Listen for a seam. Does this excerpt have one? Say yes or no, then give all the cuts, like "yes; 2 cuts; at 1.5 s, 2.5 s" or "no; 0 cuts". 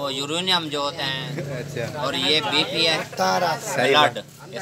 yes; 1 cut; at 1.1 s